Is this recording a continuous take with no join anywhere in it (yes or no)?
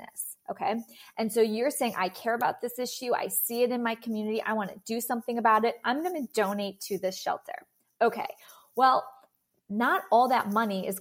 yes